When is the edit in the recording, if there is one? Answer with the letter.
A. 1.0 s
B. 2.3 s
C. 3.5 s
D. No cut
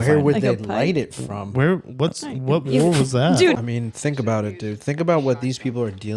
C